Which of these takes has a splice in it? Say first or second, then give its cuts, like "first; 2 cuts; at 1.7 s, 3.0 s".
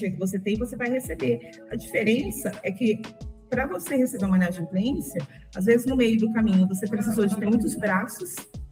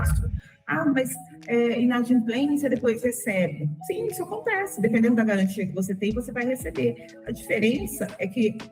second; 1 cut; at 3.8 s